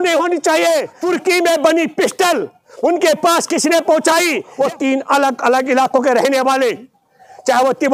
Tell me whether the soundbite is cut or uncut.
cut